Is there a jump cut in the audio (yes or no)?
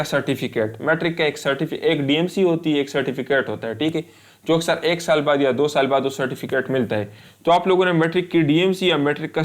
no